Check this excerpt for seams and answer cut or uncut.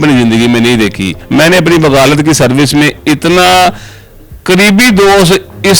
cut